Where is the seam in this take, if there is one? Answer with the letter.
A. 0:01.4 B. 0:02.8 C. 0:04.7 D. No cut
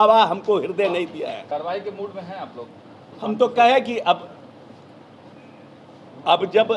A